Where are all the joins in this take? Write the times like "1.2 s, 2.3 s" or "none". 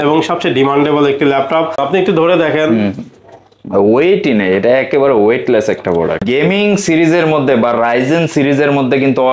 1.8 s, 6.2 s